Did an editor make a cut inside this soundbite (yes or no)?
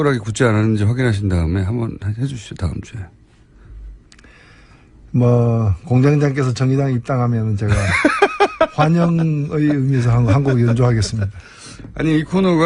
yes